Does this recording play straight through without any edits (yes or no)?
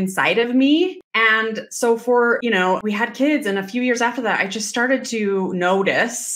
no